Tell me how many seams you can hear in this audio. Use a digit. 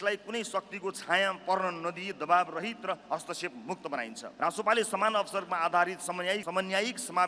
1